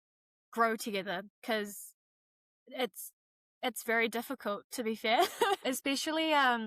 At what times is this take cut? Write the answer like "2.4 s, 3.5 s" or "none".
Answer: 5.6 s

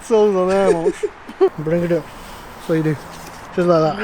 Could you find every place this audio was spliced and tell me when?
1.5 s

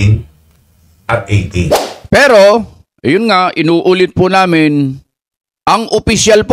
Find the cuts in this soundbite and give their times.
1.9 s

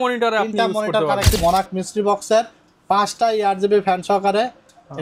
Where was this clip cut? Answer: 1.4 s

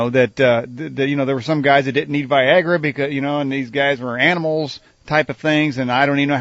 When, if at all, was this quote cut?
2.1 s

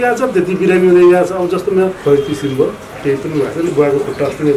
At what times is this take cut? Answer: 2.0 s

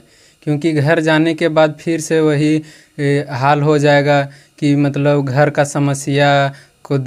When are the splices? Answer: none

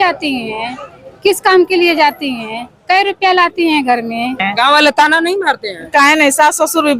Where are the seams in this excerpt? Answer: 4.4 s

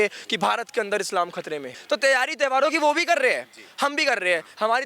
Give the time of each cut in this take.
1.7 s

